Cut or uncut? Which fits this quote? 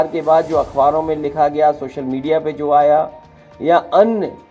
uncut